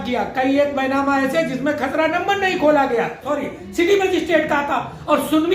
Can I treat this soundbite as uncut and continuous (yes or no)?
no